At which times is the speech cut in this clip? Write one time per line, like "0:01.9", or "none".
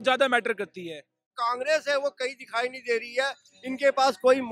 0:01.4